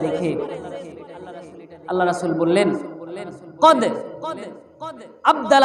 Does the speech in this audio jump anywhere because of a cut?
no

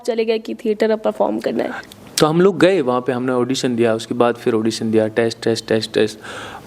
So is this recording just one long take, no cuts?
no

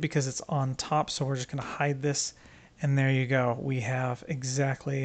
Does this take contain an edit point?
no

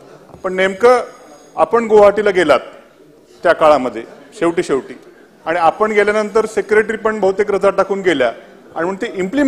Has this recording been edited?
no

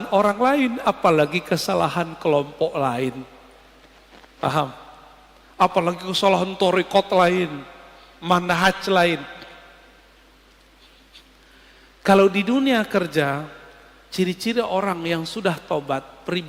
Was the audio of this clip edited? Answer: no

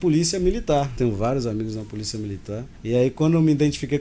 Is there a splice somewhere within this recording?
yes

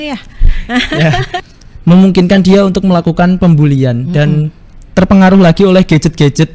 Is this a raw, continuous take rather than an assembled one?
no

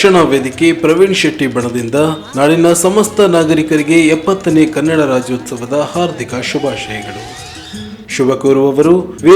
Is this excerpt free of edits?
yes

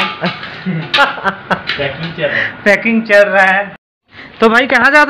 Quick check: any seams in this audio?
yes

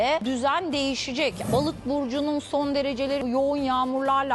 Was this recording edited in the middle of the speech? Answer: yes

